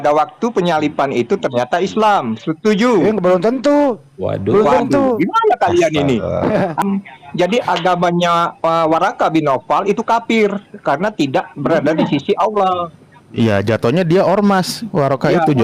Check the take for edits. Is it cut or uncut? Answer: cut